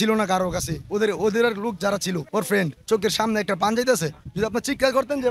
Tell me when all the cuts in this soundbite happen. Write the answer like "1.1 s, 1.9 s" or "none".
2.5 s